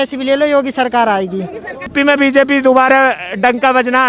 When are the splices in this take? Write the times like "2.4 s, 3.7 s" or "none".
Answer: 1.9 s